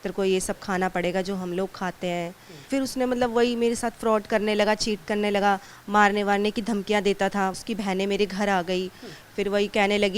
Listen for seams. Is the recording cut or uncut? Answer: cut